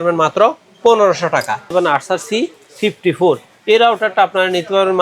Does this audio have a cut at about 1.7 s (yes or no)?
yes